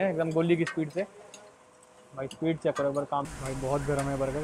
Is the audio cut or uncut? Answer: cut